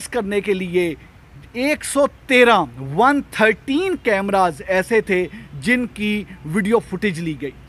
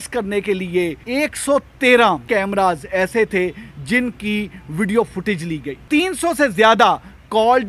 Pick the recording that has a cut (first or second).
second